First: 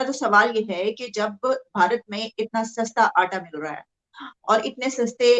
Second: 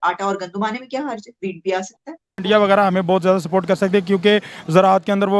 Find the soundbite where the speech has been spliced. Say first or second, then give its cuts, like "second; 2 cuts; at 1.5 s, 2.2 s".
second; 1 cut; at 2.4 s